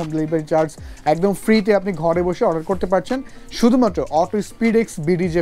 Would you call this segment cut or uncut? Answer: uncut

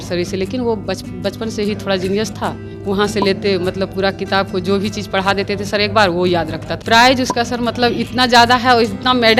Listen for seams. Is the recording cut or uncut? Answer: cut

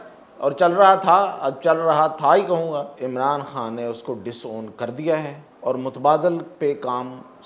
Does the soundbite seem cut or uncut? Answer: cut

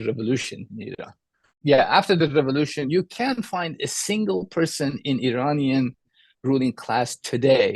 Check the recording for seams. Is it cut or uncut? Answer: cut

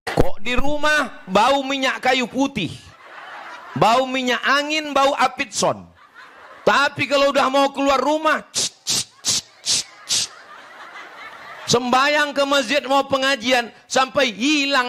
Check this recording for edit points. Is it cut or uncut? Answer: uncut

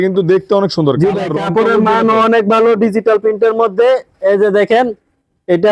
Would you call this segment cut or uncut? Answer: uncut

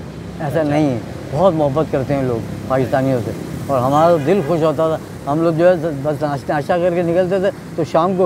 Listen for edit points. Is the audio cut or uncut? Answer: uncut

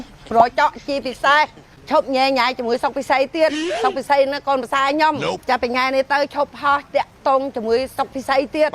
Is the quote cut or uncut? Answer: cut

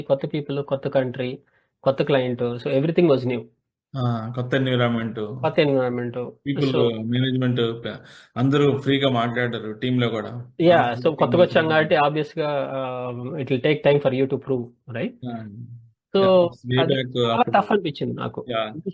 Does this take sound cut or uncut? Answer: uncut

